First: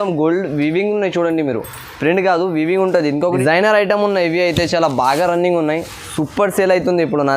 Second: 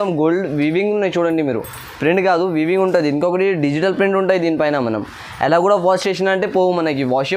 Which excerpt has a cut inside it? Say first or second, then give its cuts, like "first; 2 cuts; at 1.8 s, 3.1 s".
first; 1 cut; at 3.4 s